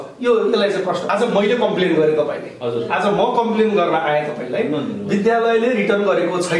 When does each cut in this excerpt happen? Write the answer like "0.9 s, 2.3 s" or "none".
1.1 s